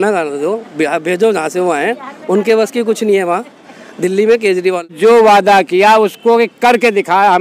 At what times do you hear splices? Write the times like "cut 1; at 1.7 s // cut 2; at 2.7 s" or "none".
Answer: cut 1; at 4.9 s